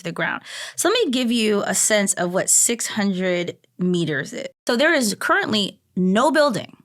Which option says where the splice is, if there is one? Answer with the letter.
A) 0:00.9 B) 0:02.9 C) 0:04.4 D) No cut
C